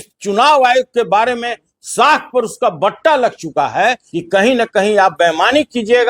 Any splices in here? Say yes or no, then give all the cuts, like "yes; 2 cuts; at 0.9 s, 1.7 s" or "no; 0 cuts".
yes; 1 cut; at 4.1 s